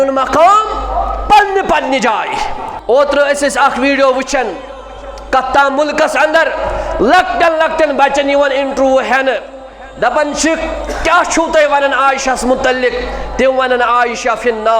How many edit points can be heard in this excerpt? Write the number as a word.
one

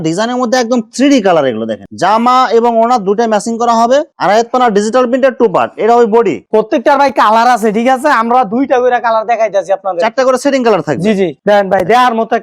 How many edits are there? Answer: three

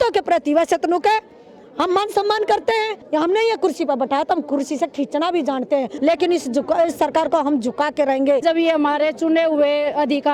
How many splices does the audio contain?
three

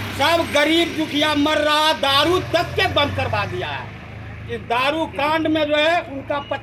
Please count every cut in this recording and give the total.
zero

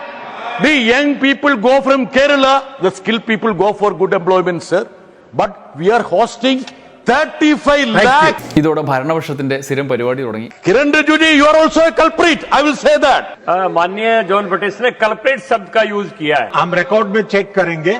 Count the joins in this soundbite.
four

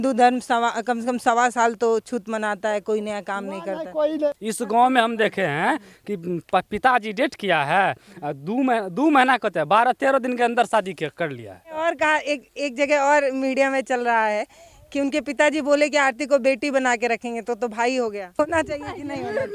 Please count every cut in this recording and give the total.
three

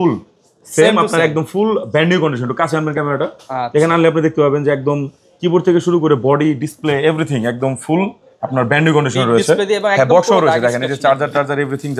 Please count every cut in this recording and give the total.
zero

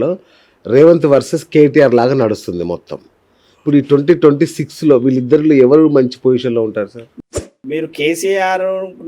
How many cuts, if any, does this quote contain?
one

